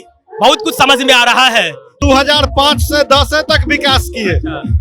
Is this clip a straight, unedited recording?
no; 1 cut; at 1.9 s

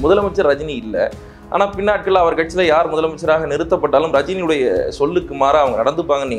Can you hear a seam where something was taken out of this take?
no; 0 cuts

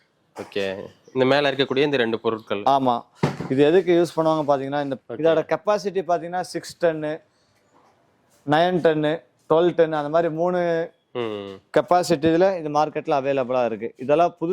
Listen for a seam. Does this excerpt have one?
yes; 1 cut; at 4.9 s

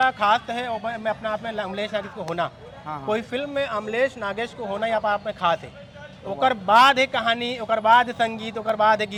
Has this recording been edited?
no; 0 cuts

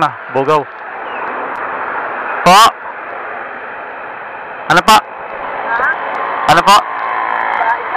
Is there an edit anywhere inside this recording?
no; 0 cuts

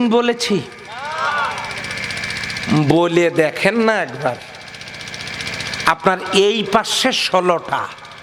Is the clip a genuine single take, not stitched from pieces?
yes; 0 cuts

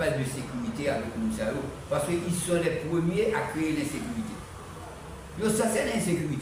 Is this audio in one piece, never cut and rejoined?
yes; 0 cuts

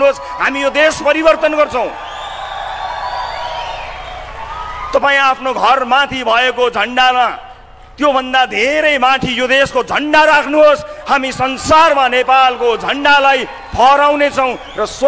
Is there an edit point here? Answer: no; 0 cuts

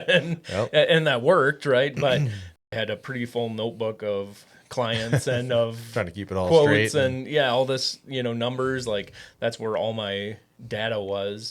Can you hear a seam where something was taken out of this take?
yes; 1 cut; at 2.5 s

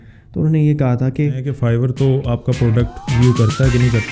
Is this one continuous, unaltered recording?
no; 1 cut; at 1.5 s

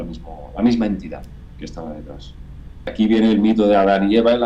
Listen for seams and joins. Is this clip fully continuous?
no; 1 cut; at 2.9 s

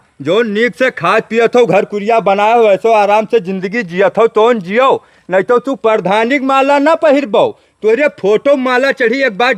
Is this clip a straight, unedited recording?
yes; 0 cuts

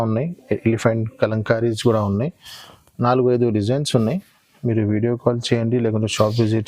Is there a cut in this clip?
no; 0 cuts

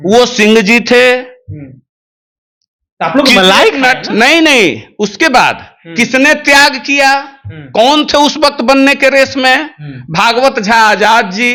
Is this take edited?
no; 0 cuts

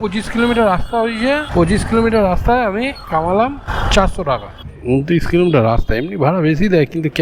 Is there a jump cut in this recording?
yes; 2 cuts; at 1.5 s, 4.7 s

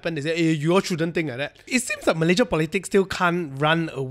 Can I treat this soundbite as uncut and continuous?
no; 1 cut; at 1.6 s

